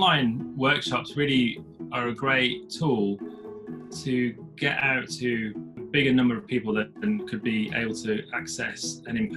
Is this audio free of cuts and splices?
no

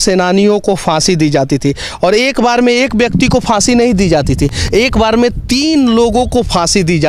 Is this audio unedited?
yes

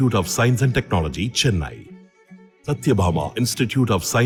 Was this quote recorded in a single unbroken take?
yes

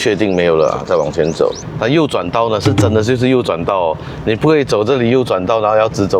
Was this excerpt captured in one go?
no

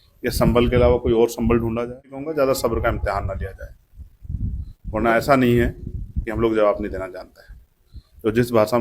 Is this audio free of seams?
no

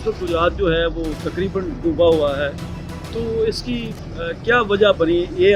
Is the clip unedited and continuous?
yes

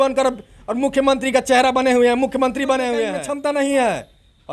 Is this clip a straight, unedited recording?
no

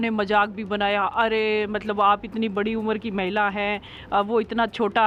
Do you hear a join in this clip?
no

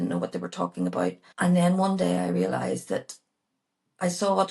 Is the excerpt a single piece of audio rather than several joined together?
no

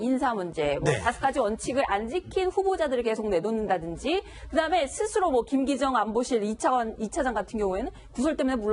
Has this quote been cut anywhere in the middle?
yes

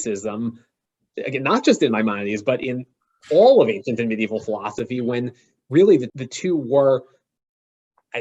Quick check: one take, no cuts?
no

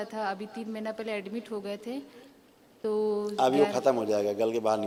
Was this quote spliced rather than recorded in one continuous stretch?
no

